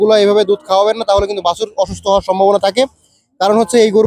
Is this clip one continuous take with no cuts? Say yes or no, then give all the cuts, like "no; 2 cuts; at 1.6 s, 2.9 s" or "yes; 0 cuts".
yes; 0 cuts